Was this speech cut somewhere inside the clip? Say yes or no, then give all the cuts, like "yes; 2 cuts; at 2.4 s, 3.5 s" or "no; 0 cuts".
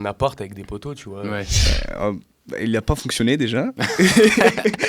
yes; 1 cut; at 1.7 s